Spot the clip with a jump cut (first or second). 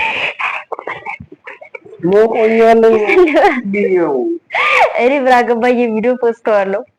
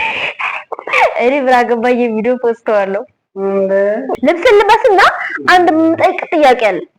second